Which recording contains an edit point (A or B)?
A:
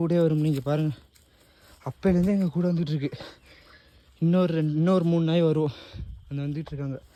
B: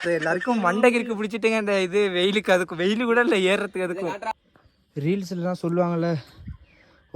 B